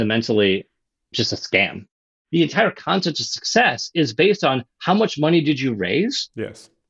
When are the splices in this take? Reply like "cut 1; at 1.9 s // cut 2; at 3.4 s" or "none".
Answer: cut 1; at 2.0 s